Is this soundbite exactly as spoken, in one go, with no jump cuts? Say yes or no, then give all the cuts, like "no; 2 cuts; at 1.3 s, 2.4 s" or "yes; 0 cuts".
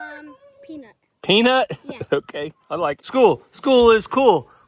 no; 1 cut; at 3.0 s